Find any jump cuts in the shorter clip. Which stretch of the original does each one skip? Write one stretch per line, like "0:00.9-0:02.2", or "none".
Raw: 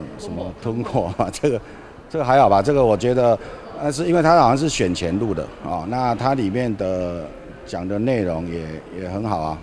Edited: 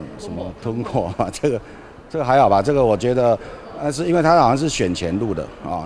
none